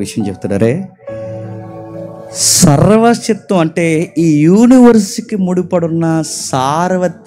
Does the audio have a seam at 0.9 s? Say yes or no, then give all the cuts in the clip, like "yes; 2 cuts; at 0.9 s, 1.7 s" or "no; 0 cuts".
no; 0 cuts